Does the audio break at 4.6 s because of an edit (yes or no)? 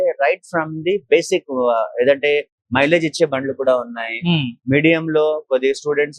no